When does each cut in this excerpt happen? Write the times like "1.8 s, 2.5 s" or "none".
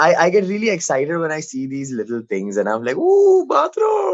none